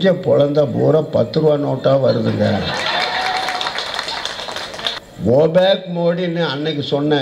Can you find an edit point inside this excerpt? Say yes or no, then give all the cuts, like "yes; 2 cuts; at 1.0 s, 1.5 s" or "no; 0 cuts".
yes; 1 cut; at 5.0 s